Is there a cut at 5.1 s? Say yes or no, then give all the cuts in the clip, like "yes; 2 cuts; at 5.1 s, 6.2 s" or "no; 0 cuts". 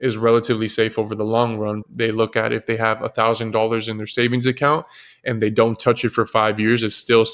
no; 1 cut; at 1.9 s